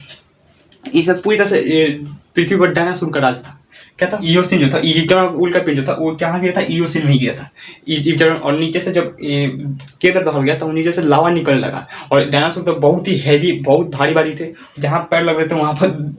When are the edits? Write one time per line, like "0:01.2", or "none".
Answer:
0:04.2